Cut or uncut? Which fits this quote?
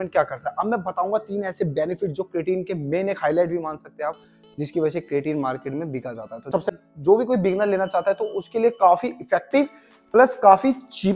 cut